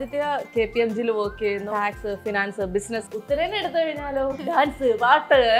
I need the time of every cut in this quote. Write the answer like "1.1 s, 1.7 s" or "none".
1.7 s, 3.0 s, 4.4 s